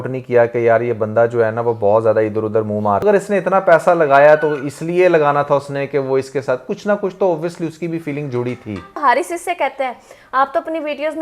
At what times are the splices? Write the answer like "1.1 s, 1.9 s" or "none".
3.0 s, 9.0 s